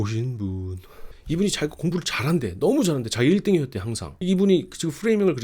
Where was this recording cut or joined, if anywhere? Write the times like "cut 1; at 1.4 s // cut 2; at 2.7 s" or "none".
cut 1; at 4.1 s